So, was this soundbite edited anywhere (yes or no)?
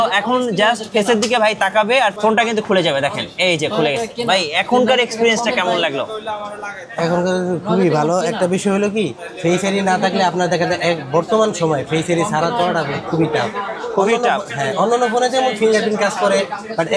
no